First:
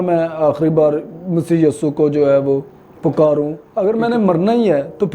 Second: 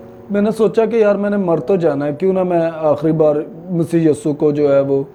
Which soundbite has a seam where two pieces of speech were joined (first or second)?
first